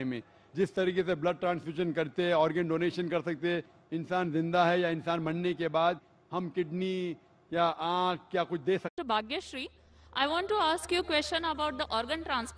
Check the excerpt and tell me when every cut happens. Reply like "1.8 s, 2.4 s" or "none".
none